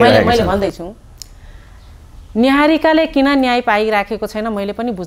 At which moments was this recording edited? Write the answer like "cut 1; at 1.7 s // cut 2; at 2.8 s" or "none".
none